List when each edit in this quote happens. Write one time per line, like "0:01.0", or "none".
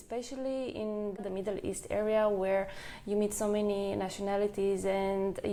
none